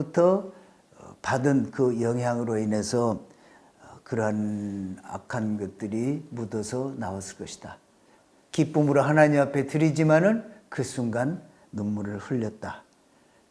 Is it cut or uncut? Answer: cut